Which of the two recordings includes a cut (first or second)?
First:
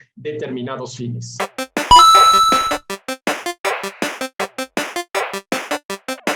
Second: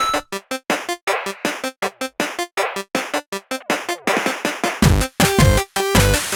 first